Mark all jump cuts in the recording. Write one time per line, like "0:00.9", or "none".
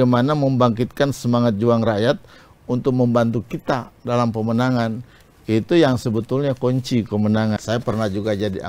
0:07.6